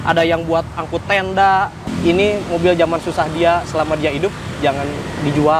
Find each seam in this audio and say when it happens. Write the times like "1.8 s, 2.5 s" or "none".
1.8 s